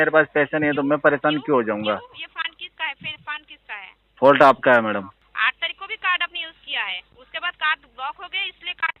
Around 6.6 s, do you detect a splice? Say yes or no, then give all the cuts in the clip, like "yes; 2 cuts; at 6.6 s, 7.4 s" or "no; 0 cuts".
no; 1 cut; at 5.2 s